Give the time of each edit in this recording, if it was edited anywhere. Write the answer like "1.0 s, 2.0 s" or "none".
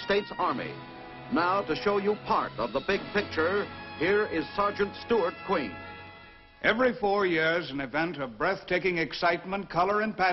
6.6 s